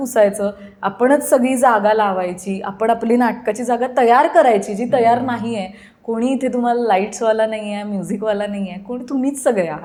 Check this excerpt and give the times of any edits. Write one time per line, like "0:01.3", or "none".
none